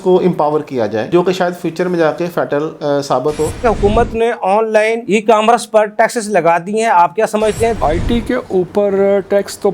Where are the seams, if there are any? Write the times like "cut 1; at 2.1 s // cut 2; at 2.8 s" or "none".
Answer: cut 1; at 1.1 s // cut 2; at 3.6 s // cut 3; at 7.8 s